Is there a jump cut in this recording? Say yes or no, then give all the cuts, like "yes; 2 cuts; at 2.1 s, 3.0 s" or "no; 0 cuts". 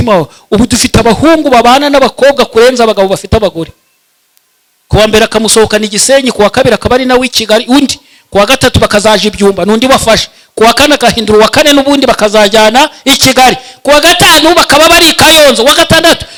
no; 0 cuts